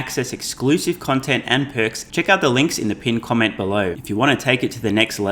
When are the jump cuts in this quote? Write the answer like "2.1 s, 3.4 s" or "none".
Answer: 2.0 s, 4.0 s